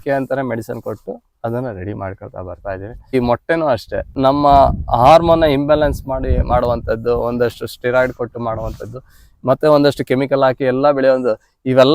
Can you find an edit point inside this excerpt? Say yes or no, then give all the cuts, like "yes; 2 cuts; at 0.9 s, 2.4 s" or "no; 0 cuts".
yes; 2 cuts; at 3.1 s, 4.1 s